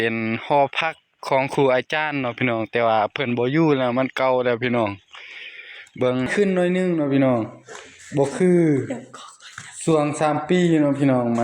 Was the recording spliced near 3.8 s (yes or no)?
no